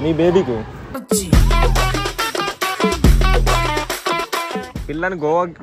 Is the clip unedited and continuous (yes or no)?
no